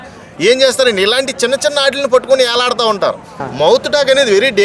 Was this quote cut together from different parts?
yes; 1 cut; at 3.4 s

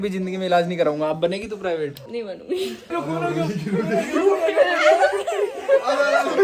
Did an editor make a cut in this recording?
yes; 1 cut; at 2.9 s

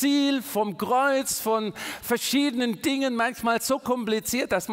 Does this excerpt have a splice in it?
no; 0 cuts

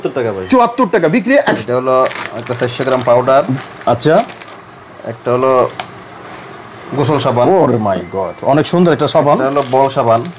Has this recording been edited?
yes; 1 cut; at 1.6 s

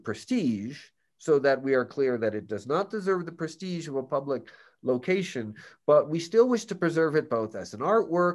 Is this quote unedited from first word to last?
yes; 0 cuts

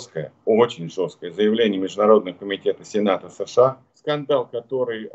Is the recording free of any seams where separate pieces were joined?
no; 1 cut; at 3.9 s

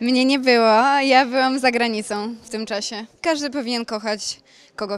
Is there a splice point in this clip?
yes; 1 cut; at 3.1 s

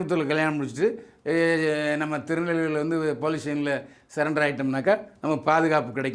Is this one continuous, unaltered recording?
yes; 0 cuts

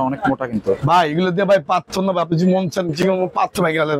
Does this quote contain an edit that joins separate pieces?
no; 0 cuts

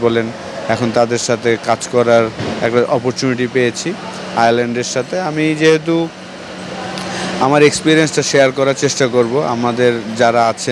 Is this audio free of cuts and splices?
yes; 0 cuts

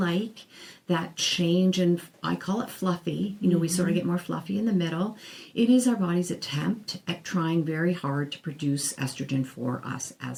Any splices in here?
no; 0 cuts

